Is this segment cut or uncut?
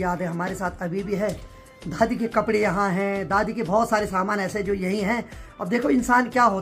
uncut